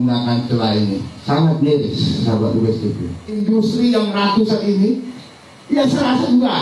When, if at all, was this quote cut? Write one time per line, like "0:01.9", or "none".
0:03.4